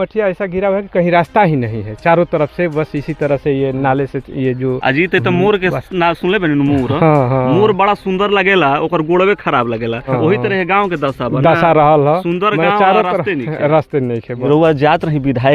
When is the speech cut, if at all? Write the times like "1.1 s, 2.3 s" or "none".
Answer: 10.1 s, 14.4 s